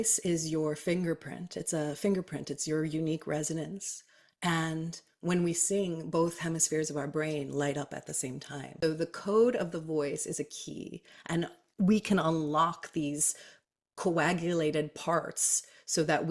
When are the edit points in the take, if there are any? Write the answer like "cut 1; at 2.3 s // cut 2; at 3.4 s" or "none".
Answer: cut 1; at 8.7 s